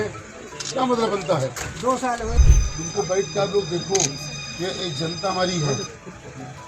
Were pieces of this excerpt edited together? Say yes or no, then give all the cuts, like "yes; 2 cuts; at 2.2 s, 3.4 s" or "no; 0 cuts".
yes; 1 cut; at 2.4 s